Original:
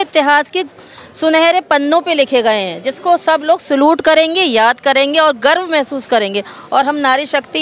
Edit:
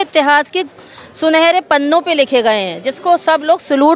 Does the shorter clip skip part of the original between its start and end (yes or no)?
no